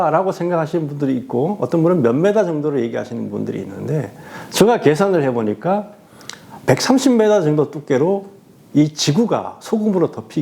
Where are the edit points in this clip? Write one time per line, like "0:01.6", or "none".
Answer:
none